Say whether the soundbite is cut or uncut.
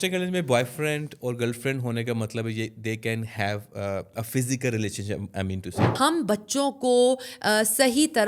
cut